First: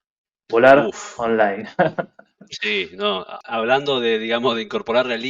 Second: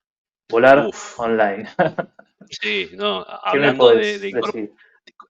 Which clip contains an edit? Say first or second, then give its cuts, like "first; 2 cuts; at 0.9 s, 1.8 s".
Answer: first; 1 cut; at 3.4 s